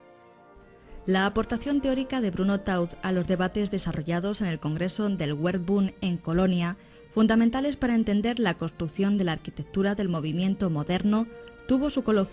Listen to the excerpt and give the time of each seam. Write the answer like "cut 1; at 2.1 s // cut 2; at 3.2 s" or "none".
cut 1; at 8.6 s

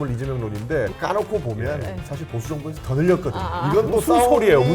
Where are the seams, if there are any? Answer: cut 1; at 0.9 s

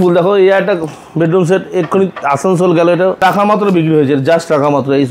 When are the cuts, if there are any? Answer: cut 1; at 3.2 s

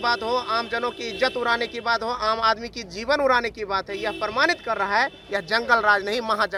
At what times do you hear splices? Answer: none

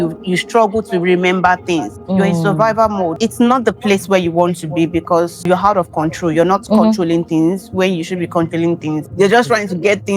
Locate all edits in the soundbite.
cut 1; at 2.0 s // cut 2; at 3.1 s // cut 3; at 5.4 s // cut 4; at 9.0 s

